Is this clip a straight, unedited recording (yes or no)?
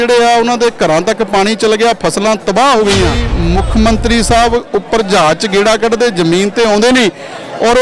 no